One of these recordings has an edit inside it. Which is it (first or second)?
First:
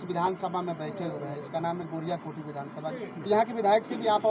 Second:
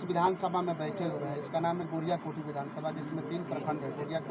first